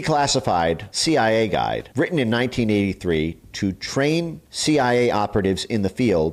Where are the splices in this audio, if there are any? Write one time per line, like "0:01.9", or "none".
0:00.9
0:01.9
0:04.4